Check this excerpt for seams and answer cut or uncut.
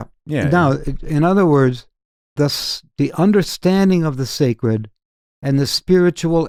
uncut